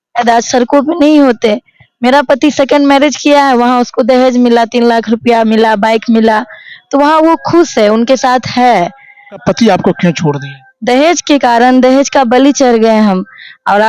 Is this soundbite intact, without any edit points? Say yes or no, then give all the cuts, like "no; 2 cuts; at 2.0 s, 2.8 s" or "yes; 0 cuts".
no; 1 cut; at 9.4 s